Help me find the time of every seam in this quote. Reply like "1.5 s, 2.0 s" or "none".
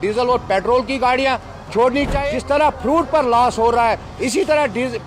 2.2 s